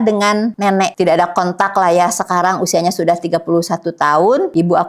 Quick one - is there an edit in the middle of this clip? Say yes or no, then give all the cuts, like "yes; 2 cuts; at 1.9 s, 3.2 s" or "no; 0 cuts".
yes; 1 cut; at 0.9 s